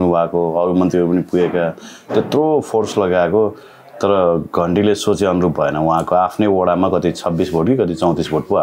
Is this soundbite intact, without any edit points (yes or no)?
yes